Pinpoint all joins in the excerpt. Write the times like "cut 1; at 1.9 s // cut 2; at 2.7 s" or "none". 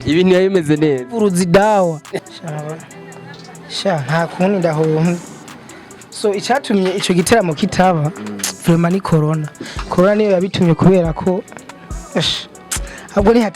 cut 1; at 2.1 s